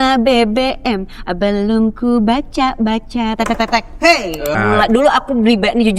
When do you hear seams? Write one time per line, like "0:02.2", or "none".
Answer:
0:04.6